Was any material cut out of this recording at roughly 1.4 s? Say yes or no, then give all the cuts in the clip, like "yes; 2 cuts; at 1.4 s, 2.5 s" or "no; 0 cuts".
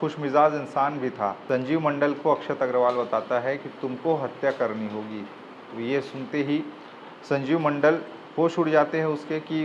yes; 1 cut; at 1.4 s